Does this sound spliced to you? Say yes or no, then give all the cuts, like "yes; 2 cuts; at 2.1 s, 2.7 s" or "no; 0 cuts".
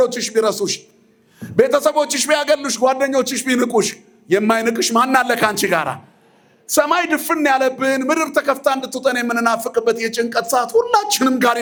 no; 0 cuts